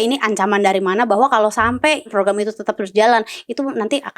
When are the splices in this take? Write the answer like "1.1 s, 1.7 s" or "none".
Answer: 2.1 s